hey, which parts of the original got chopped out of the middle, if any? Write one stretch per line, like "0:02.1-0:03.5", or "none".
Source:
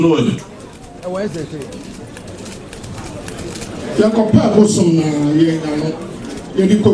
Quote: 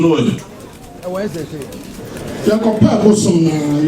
0:02.2-0:03.8